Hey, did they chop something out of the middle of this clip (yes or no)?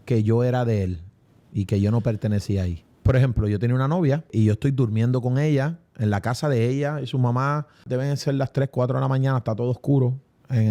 yes